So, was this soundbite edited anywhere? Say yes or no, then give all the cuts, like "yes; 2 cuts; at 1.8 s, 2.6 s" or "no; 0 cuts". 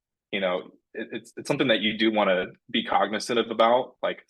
no; 0 cuts